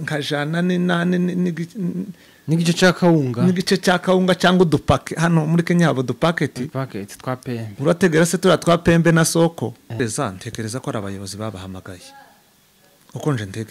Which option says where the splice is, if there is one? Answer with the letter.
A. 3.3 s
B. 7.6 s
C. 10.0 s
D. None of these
C